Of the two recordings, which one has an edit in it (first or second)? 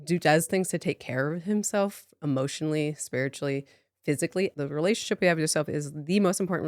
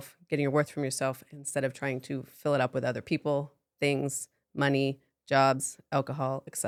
first